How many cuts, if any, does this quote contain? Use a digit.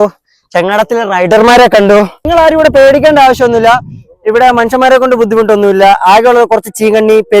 1